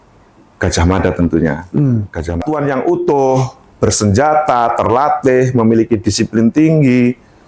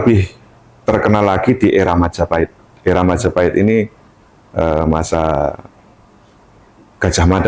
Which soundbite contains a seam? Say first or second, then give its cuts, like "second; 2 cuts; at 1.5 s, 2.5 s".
first; 1 cut; at 2.4 s